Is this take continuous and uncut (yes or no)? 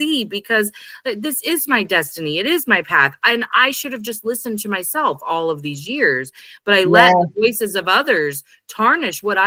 yes